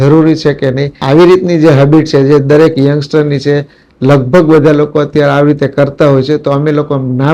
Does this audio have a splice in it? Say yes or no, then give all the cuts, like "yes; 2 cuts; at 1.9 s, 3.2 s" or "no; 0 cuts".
yes; 1 cut; at 1.0 s